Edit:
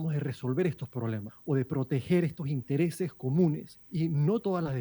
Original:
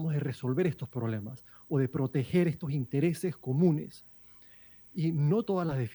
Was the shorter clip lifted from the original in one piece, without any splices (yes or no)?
no